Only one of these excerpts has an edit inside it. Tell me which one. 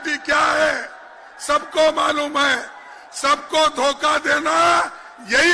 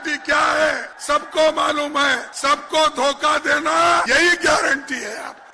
second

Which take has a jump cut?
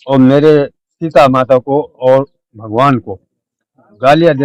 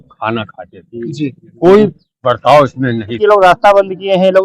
second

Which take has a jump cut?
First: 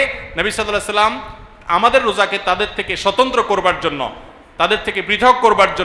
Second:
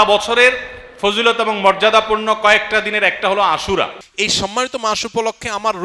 second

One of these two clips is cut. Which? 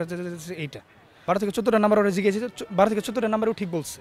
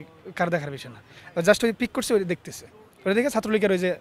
first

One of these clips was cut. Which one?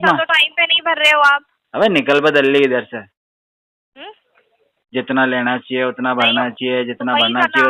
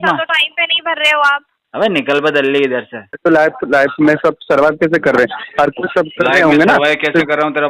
second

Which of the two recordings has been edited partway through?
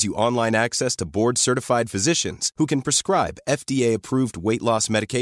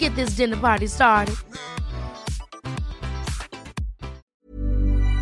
second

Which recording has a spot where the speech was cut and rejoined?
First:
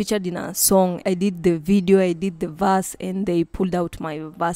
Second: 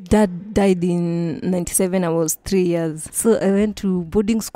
second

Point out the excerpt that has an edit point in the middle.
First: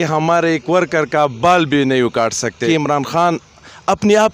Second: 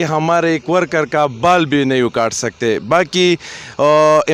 first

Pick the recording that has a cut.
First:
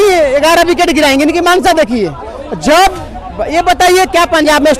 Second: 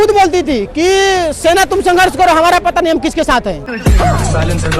second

